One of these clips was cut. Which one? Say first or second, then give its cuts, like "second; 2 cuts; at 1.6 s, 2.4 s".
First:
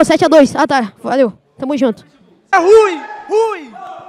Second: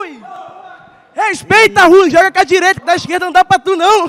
first; 1 cut; at 2.5 s